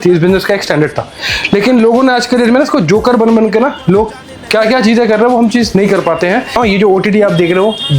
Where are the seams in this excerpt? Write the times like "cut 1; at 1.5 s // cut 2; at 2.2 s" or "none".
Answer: cut 1; at 6.6 s